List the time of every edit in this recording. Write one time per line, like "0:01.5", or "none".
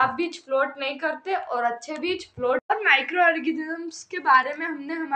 0:02.6